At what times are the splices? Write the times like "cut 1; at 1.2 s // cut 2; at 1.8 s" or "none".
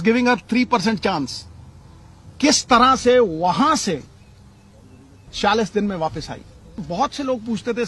cut 1; at 6.8 s